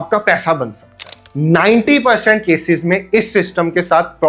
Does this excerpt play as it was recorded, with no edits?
no; 1 cut; at 1.2 s

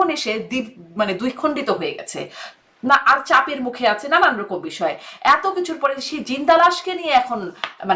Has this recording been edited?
no; 0 cuts

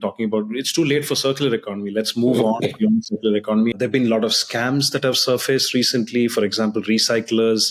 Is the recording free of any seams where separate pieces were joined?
no; 1 cut; at 3.8 s

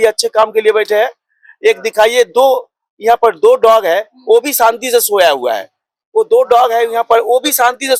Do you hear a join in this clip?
no; 0 cuts

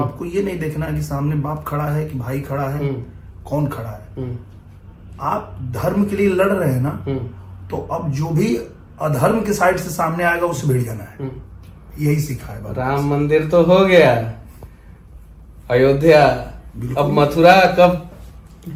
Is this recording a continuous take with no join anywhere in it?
yes; 0 cuts

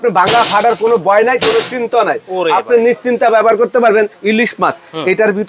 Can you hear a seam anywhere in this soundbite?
yes; 1 cut; at 4.2 s

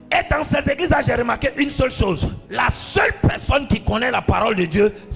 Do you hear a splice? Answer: yes; 1 cut; at 2.4 s

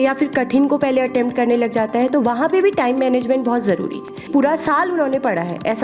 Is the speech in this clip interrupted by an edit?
yes; 1 cut; at 4.2 s

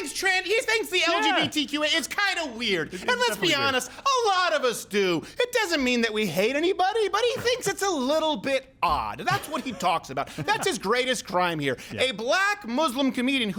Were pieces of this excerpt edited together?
no; 0 cuts

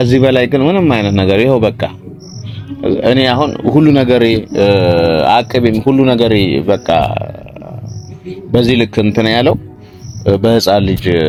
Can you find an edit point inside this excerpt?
no; 0 cuts

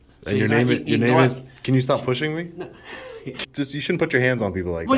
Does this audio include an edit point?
yes; 1 cut; at 3.3 s

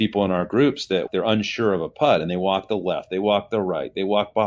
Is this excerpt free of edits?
no; 1 cut; at 1.1 s

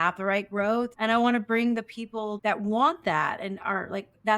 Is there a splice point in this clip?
yes; 2 cuts; at 0.9 s, 2.4 s

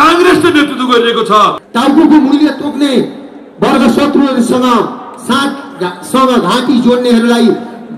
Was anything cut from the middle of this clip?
yes; 1 cut; at 1.6 s

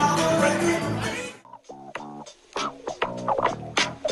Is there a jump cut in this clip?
yes; 1 cut; at 1.1 s

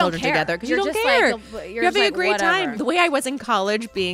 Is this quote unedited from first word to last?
no; 1 cut; at 2.7 s

